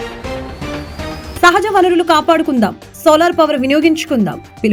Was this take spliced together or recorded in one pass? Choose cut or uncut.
uncut